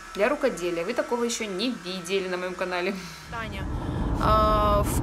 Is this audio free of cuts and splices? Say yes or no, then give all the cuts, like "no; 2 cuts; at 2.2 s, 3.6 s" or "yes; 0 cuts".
no; 1 cut; at 3.7 s